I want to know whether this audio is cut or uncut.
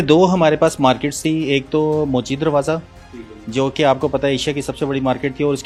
uncut